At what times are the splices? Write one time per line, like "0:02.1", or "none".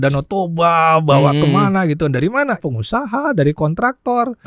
0:02.6